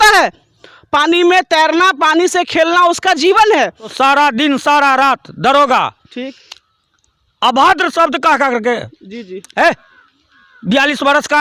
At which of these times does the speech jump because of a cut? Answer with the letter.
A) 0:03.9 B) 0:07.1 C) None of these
A